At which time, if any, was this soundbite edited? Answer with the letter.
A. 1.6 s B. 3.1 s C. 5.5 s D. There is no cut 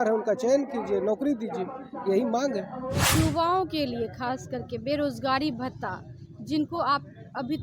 B